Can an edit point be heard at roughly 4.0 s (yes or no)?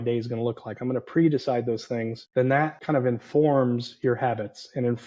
no